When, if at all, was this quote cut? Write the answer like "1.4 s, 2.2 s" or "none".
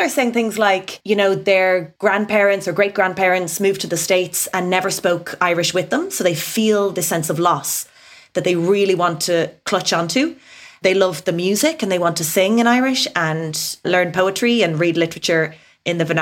0.9 s, 1.9 s, 13.8 s